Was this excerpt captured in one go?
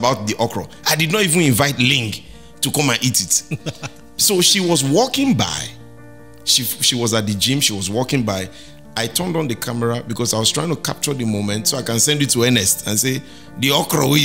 yes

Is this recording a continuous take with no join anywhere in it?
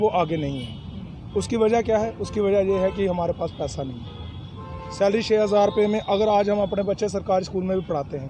yes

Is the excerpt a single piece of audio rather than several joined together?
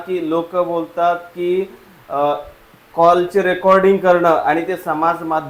yes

